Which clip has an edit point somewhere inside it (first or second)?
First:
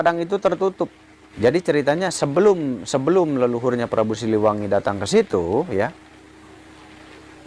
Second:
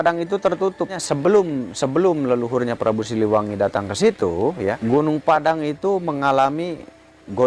second